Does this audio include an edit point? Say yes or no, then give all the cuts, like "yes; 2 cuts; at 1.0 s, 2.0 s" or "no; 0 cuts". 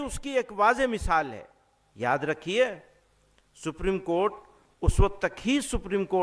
no; 0 cuts